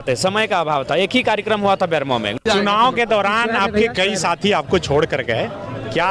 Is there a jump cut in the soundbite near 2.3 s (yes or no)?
yes